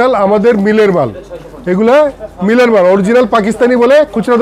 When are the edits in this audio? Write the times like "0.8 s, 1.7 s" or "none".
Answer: none